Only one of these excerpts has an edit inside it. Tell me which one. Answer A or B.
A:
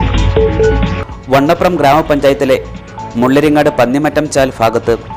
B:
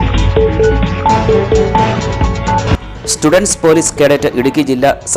A